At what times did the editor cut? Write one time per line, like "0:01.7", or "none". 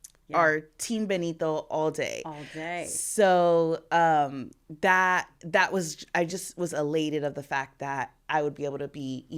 none